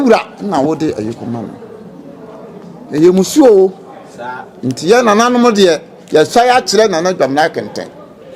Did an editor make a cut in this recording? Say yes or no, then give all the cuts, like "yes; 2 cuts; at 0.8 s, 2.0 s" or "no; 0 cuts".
no; 0 cuts